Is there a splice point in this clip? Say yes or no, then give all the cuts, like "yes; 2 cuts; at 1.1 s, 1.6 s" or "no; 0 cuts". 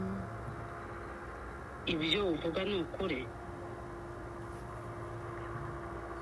no; 0 cuts